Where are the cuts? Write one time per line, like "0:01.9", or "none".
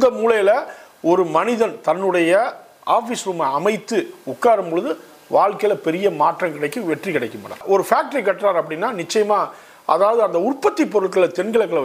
0:07.6